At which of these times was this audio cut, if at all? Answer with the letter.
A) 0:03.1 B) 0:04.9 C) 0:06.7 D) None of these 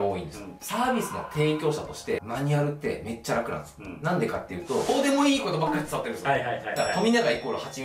B